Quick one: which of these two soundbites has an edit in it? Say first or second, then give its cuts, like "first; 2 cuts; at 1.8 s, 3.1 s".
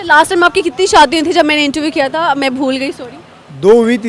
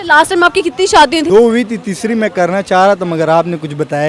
second; 1 cut; at 1.3 s